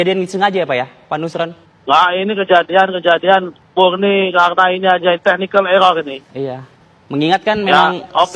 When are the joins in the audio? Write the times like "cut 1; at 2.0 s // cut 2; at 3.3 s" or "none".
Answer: cut 1; at 1.7 s // cut 2; at 3.6 s